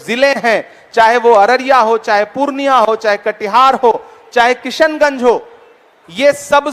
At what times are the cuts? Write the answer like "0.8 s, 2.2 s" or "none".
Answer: none